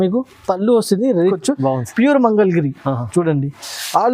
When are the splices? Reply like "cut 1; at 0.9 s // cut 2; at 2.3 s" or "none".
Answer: cut 1; at 1.4 s